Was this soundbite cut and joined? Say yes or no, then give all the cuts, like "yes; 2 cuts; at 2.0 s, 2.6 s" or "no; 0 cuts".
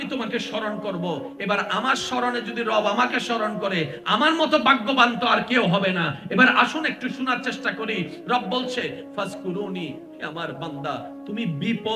no; 0 cuts